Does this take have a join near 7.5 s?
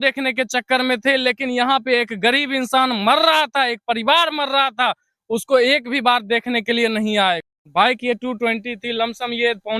yes; 1 cut; at 7.5 s

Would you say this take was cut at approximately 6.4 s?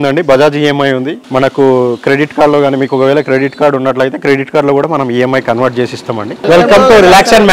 yes; 2 cuts; at 1.2 s, 6.4 s

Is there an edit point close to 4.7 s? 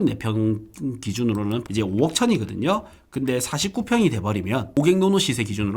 yes; 2 cuts; at 1.6 s, 4.7 s

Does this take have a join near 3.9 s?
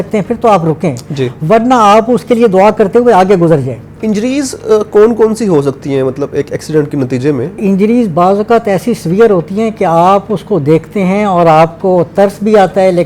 yes; 2 cuts; at 3.9 s, 7.6 s

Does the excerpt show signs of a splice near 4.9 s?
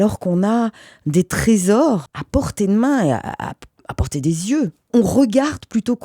yes; 2 cuts; at 2.1 s, 4.9 s

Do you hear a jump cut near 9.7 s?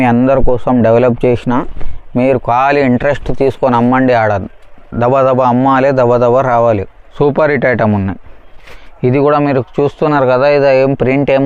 no; 1 cut; at 7.0 s

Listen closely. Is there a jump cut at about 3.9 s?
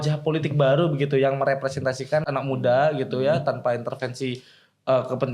no; 1 cut; at 2.2 s

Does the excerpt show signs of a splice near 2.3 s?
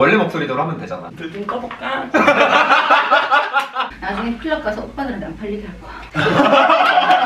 no; 2 cuts; at 1.0 s, 3.9 s

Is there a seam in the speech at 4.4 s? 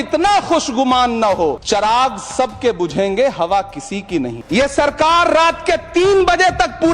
yes; 2 cuts; at 1.6 s, 4.4 s

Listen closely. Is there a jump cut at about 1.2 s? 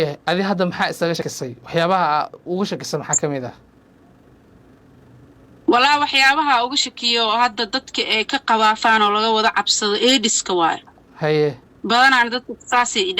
yes; 1 cut; at 1.2 s

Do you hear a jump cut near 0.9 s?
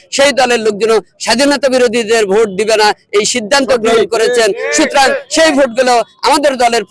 no; 0 cuts

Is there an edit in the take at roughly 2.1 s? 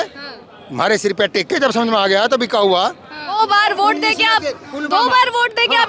no; 1 cut; at 3.3 s

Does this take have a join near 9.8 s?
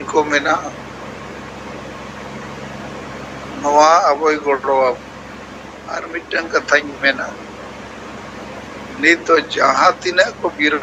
no; 1 cut; at 6.0 s

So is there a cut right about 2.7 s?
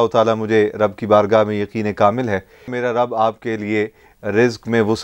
yes; 1 cut; at 2.7 s

